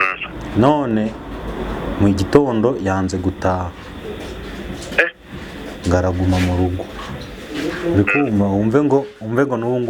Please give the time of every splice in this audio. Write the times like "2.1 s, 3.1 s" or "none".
none